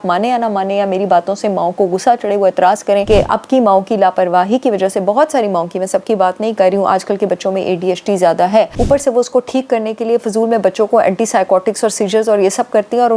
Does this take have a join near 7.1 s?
no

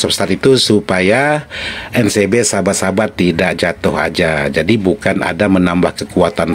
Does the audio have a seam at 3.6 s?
no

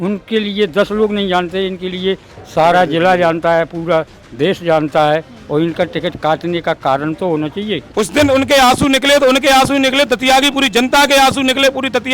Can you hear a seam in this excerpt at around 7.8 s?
yes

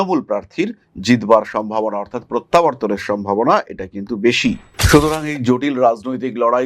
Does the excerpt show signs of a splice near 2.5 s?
no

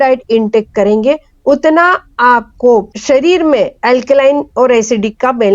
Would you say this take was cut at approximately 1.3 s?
no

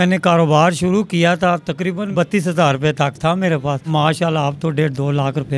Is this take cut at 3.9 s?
yes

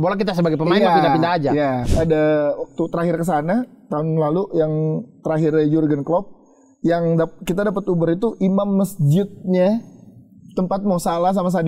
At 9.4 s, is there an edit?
no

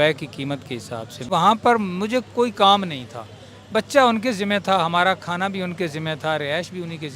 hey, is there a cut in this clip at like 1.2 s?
yes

